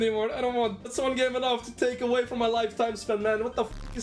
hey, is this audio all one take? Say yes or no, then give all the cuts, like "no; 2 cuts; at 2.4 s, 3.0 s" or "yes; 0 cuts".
yes; 0 cuts